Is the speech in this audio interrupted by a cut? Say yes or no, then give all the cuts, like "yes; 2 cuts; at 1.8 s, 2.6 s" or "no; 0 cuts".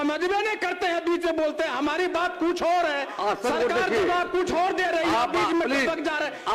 no; 0 cuts